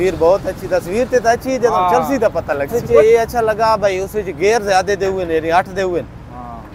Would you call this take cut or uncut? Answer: cut